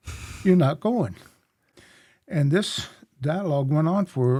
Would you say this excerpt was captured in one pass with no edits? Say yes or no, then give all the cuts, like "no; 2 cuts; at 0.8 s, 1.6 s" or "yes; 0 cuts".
yes; 0 cuts